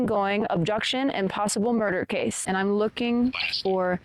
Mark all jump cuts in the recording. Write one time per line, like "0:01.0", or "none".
0:02.4